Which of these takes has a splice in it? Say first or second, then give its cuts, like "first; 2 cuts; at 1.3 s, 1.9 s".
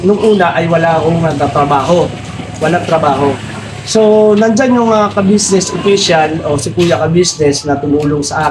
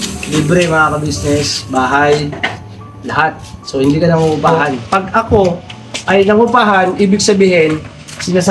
second; 1 cut; at 4.7 s